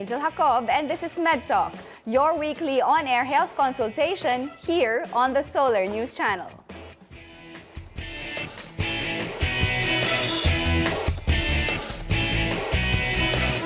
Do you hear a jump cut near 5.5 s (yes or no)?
no